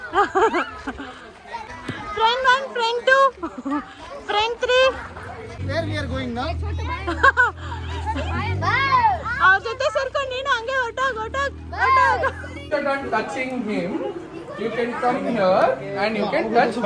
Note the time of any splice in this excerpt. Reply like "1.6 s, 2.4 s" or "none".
1.7 s, 5.6 s, 12.5 s